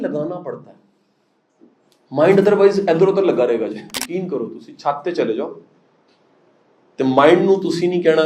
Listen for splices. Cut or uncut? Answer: cut